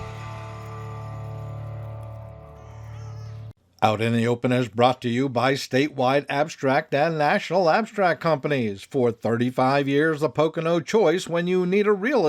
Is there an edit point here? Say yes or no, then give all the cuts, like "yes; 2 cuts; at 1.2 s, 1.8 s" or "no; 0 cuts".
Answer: yes; 1 cut; at 3.6 s